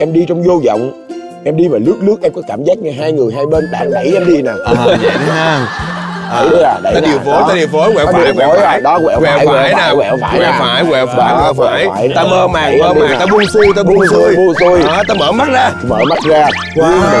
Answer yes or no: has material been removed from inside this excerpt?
no